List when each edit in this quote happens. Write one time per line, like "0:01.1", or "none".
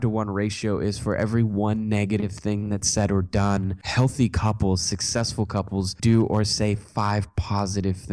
0:03.8
0:05.9